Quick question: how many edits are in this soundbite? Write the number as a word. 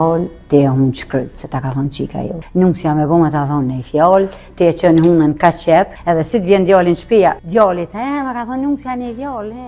three